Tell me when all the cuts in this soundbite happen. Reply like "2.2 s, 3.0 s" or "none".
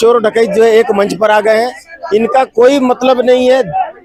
none